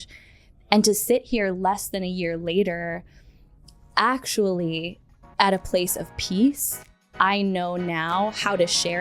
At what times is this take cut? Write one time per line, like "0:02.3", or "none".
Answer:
0:07.0